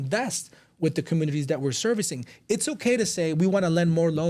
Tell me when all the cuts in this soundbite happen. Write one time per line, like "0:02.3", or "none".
none